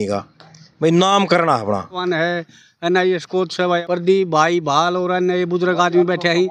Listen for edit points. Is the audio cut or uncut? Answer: cut